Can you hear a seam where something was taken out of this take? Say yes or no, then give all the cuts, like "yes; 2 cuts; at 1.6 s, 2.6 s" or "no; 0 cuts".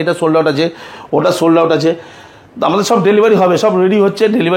no; 0 cuts